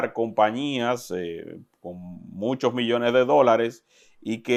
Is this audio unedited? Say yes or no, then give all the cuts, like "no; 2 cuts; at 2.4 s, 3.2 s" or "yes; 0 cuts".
yes; 0 cuts